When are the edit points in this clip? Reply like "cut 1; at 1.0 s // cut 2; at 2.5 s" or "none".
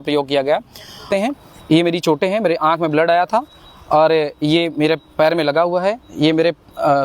cut 1; at 1.0 s